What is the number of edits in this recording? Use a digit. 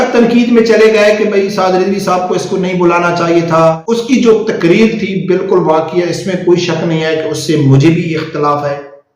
1